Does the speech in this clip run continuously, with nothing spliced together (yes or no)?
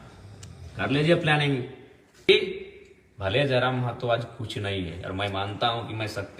no